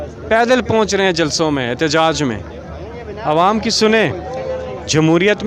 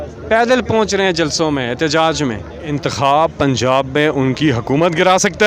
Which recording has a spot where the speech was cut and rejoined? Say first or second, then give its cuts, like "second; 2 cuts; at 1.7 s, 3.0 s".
second; 1 cut; at 2.7 s